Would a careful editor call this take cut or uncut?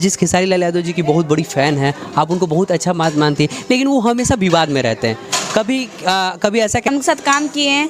cut